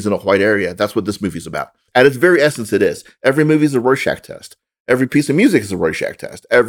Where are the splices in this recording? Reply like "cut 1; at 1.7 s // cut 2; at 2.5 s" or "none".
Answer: cut 1; at 1.8 s